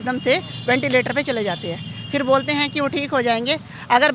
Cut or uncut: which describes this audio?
uncut